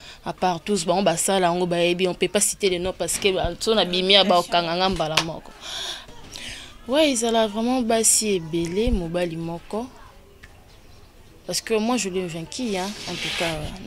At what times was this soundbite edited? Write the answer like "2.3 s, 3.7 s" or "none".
6.0 s